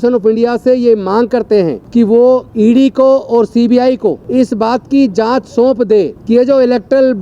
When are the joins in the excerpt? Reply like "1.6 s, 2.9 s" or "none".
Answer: 1.8 s, 2.5 s, 4.2 s, 6.2 s